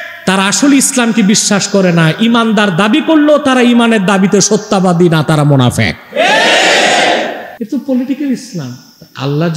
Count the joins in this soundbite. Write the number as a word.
one